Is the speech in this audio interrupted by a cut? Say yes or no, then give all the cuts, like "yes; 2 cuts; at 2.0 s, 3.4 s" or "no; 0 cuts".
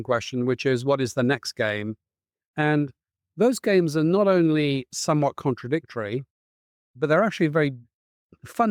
no; 0 cuts